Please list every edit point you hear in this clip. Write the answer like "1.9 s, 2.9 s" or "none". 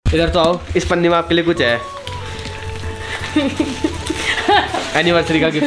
none

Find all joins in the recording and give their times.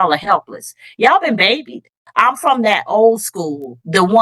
2.0 s

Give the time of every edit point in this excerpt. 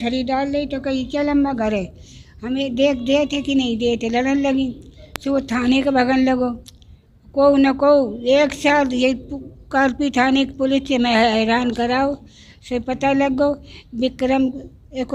none

